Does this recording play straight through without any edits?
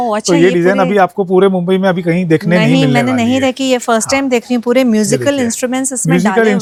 yes; 0 cuts

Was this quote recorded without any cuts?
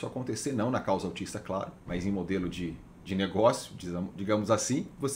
yes; 0 cuts

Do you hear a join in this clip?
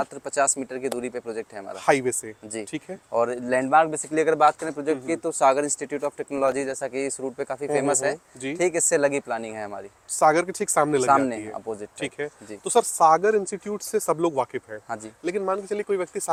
no; 0 cuts

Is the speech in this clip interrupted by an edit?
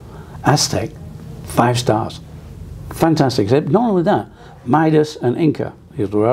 no; 0 cuts

